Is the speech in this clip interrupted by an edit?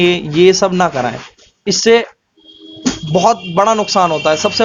no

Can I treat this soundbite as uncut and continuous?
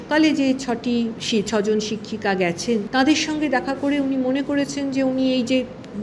no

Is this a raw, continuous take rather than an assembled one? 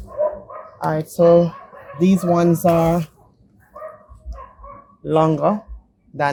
yes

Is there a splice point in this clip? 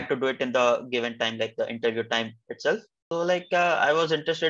yes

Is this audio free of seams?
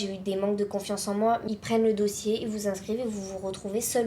no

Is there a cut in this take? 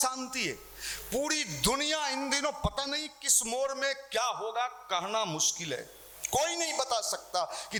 no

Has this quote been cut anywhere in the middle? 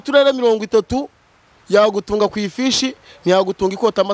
no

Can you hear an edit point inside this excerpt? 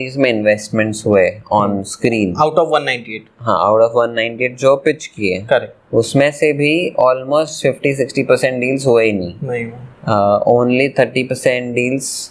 no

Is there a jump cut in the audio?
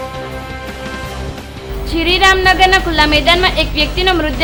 no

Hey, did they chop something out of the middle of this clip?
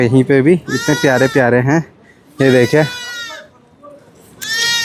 no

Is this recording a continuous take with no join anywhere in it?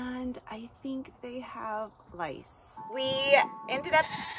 no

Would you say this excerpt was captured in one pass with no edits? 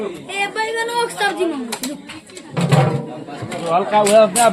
yes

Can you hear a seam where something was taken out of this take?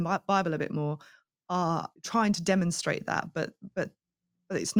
yes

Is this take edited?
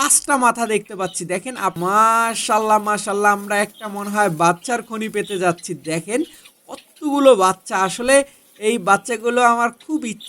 yes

